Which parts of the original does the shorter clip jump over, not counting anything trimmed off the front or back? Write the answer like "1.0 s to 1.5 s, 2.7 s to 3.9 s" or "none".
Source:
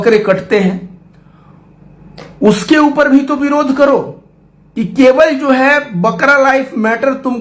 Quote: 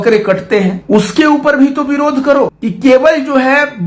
0.8 s to 2.3 s, 4.2 s to 4.8 s